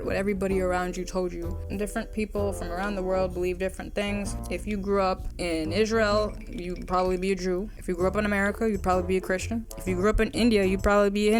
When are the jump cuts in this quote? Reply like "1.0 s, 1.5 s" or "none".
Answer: none